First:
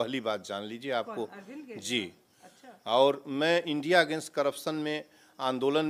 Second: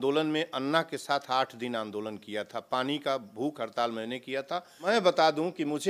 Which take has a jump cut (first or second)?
second